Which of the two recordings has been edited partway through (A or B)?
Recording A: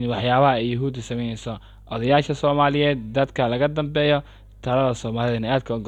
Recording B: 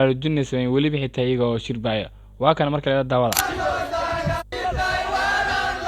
B